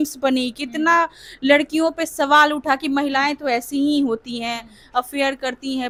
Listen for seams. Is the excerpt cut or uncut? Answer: uncut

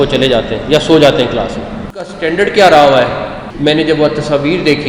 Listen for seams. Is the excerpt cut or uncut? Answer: cut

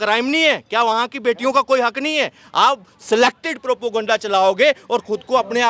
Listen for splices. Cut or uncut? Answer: uncut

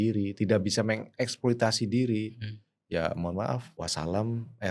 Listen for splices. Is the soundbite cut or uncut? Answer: cut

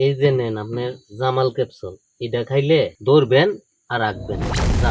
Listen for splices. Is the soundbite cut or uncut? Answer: cut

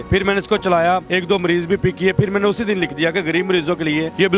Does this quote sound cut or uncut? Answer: uncut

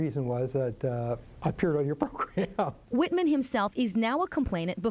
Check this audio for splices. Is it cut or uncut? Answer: cut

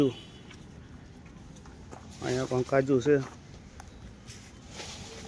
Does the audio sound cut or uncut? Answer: cut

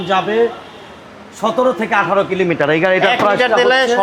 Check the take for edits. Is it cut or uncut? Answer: uncut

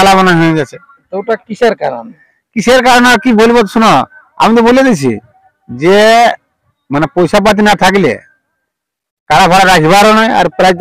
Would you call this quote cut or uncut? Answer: uncut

